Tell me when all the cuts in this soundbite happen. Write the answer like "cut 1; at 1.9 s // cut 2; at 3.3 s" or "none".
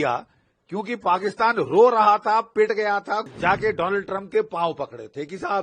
cut 1; at 3.3 s